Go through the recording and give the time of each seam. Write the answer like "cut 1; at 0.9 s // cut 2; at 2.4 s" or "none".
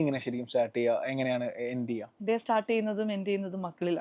cut 1; at 2.1 s